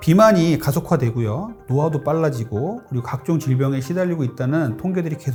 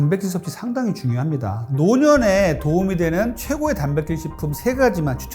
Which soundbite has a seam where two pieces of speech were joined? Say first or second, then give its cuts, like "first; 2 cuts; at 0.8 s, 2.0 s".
second; 1 cut; at 1.6 s